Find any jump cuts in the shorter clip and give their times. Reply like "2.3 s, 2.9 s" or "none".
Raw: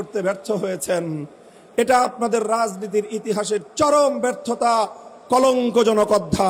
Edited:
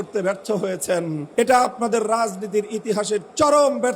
1.2 s